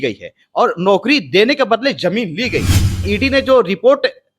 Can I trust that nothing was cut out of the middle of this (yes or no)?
no